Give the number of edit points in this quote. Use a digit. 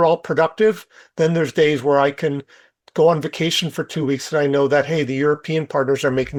0